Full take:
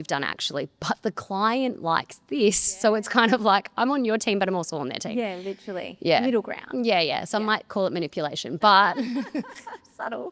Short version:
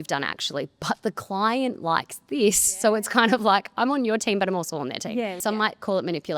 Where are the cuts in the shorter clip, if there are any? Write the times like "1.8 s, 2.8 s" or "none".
5.4 s